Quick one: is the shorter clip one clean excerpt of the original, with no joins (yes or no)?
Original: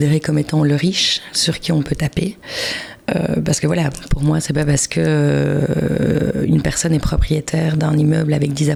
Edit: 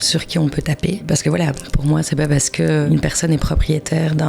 no